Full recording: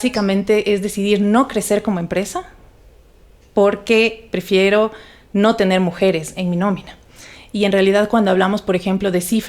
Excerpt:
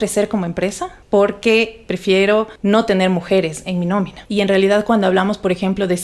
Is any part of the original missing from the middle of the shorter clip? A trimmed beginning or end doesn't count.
yes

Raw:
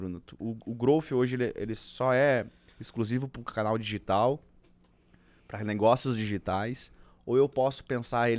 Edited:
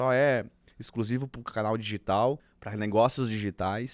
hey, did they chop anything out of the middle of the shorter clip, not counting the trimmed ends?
yes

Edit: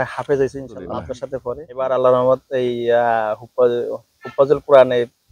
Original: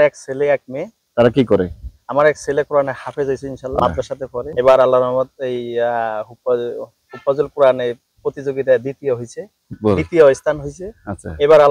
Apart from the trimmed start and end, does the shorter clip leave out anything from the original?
no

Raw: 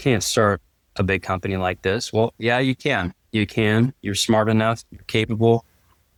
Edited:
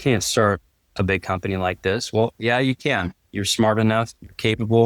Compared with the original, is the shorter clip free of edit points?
no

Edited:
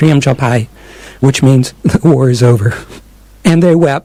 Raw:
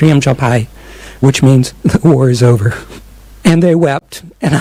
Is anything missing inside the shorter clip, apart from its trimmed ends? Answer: no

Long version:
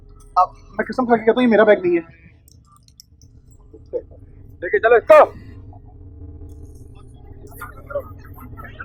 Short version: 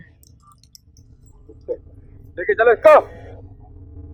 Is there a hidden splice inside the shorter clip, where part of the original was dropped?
no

